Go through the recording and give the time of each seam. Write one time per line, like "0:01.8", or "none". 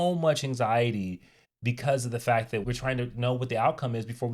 0:02.6